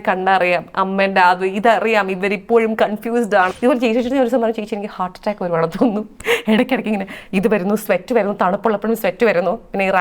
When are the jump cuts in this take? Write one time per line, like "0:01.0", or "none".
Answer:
0:03.5